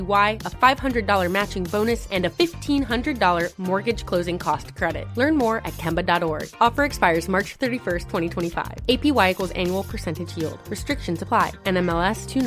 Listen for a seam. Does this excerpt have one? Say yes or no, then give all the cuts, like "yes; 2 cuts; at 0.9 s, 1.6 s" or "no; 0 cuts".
no; 0 cuts